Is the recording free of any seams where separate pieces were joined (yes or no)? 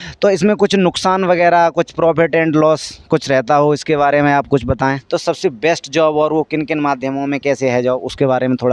no